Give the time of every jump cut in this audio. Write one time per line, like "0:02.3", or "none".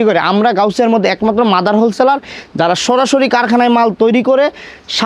none